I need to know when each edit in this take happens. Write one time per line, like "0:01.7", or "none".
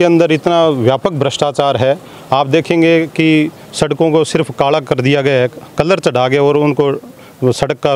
none